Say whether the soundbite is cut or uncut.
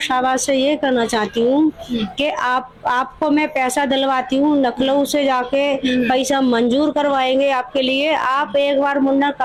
uncut